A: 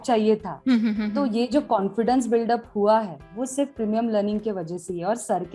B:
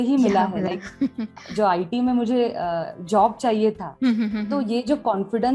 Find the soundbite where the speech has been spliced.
B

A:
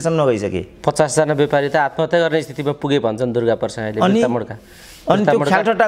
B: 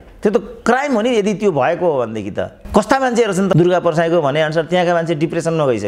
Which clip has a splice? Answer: B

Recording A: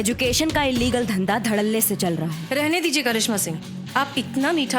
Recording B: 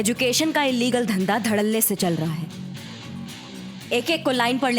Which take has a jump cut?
A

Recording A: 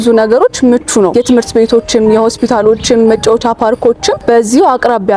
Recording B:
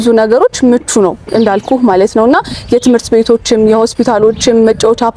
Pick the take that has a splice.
A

